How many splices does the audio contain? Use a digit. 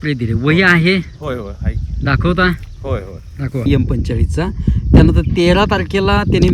1